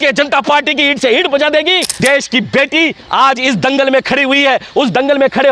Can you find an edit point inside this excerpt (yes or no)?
yes